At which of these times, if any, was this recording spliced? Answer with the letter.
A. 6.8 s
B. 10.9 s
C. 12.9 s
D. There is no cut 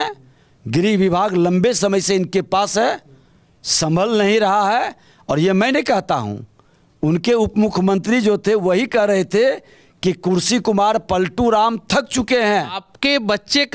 C